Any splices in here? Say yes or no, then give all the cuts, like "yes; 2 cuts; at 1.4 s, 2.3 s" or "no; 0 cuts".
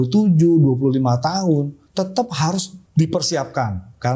yes; 2 cuts; at 1.8 s, 2.8 s